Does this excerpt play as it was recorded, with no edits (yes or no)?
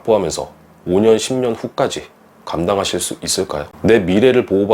no